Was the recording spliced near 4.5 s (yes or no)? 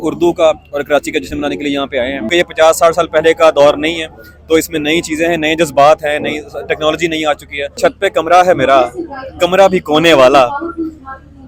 no